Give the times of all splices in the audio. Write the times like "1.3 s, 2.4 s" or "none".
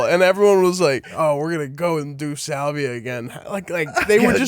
1.1 s